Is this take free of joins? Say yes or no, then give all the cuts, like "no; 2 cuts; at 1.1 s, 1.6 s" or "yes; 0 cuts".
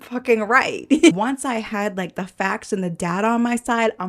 no; 1 cut; at 1.1 s